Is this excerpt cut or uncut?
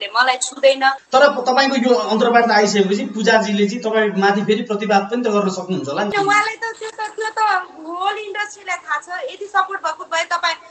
cut